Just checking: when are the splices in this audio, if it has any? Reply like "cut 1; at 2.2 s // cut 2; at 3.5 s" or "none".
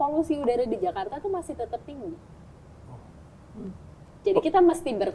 none